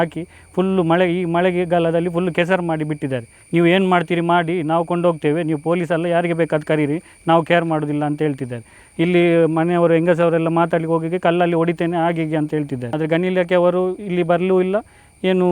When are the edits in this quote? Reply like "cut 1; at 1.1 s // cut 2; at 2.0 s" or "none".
cut 1; at 3.3 s // cut 2; at 12.8 s